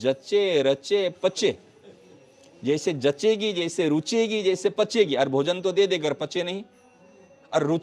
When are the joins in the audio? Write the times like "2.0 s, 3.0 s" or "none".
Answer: none